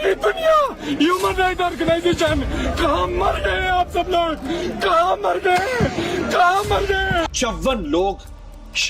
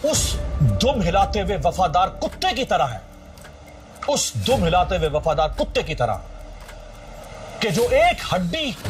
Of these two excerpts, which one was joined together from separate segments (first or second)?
first